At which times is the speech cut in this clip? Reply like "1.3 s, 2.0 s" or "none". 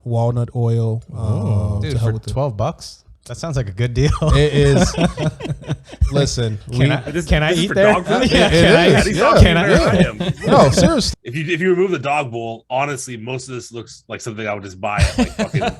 11.1 s